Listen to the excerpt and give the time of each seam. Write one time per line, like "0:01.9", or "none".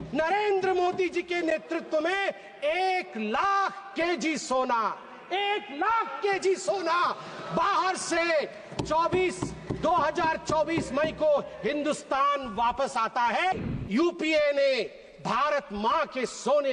0:13.5